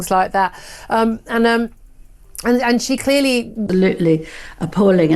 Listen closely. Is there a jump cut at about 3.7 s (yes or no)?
yes